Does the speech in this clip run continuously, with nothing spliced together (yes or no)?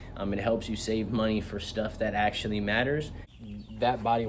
no